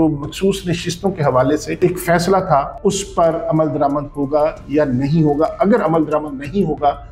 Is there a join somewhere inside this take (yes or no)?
yes